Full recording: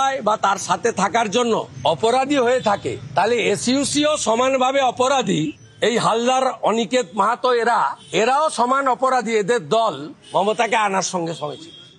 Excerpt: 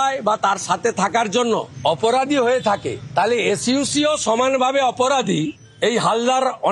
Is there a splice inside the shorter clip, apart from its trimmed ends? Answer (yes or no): no